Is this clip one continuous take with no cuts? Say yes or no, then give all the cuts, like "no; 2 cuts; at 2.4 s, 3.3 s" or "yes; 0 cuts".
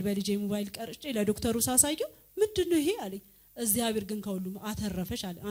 yes; 0 cuts